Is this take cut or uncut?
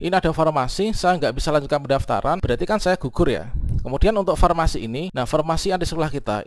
cut